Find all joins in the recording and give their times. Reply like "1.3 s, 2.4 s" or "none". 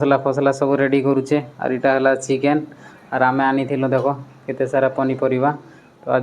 none